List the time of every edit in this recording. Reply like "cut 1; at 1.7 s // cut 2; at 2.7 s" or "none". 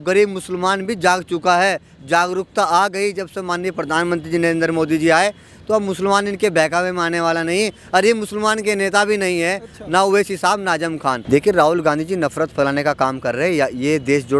cut 1; at 11.2 s